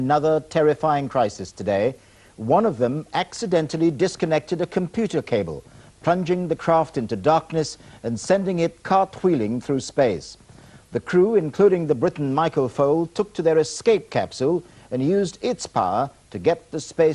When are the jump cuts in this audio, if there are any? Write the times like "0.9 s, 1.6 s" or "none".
9.3 s